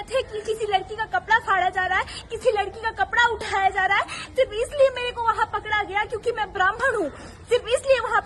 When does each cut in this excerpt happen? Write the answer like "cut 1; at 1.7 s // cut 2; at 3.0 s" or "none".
none